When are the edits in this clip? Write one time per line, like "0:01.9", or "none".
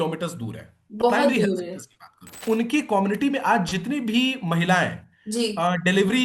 0:02.3